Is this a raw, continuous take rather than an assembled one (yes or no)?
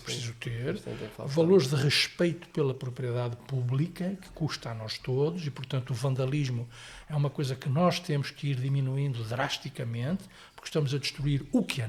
yes